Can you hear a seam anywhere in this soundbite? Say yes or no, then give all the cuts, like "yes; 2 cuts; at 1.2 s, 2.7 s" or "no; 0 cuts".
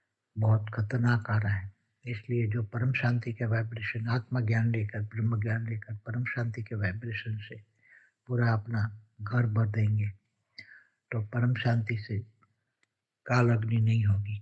no; 0 cuts